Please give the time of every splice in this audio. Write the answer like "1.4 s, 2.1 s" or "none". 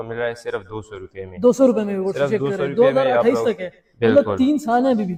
none